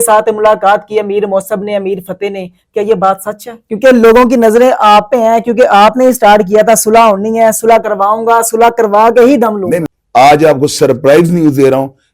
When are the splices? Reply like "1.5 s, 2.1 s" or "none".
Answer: 3.6 s, 9.9 s